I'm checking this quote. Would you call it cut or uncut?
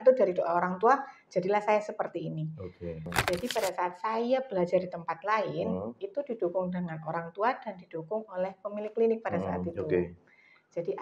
cut